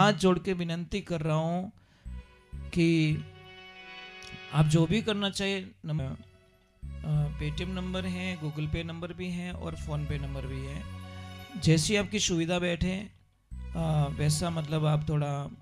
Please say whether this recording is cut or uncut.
cut